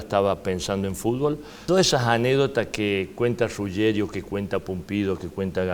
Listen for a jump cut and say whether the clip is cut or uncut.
cut